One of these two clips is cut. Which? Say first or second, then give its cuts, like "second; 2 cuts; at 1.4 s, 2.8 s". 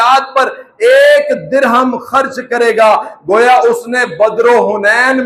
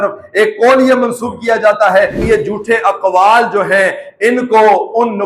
second; 1 cut; at 2.2 s